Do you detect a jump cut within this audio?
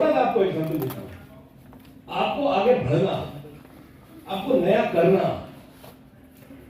no; 0 cuts

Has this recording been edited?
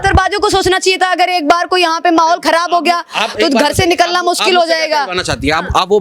no; 0 cuts

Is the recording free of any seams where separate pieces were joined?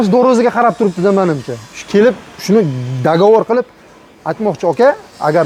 yes; 0 cuts

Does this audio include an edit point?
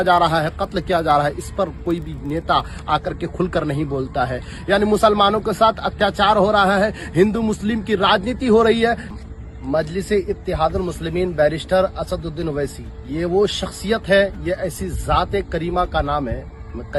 no; 0 cuts

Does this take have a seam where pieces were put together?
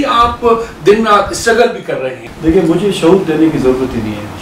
yes; 1 cut; at 2.2 s

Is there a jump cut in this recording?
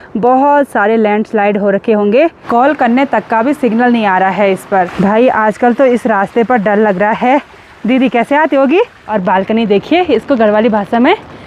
yes; 3 cuts; at 2.4 s, 4.9 s, 9.0 s

